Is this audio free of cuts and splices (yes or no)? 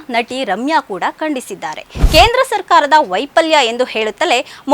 no